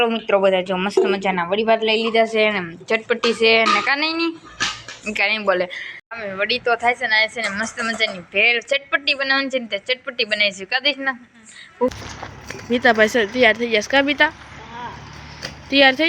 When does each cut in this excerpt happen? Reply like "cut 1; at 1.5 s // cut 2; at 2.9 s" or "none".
cut 1; at 6.0 s // cut 2; at 11.9 s